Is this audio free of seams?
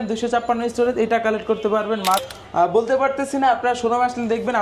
no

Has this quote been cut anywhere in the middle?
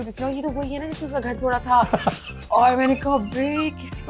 no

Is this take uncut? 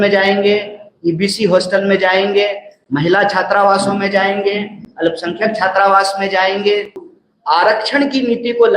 no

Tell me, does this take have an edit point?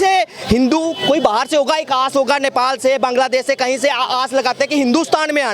no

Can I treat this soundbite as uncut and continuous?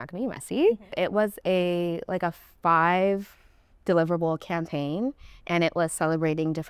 no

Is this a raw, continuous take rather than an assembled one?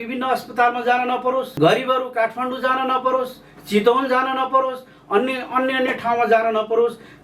no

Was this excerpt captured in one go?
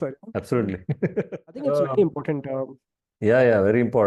no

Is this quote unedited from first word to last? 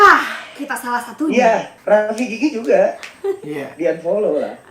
yes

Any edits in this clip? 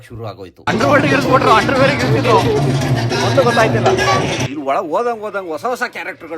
yes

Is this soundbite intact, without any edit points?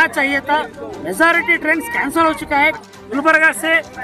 no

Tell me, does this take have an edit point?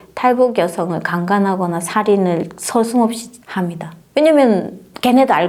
no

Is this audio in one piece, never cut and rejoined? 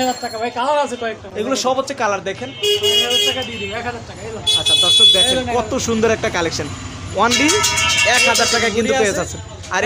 yes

